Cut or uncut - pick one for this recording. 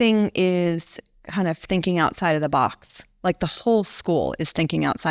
uncut